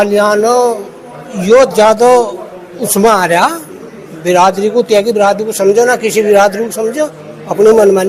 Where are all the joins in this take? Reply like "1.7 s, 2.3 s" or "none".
none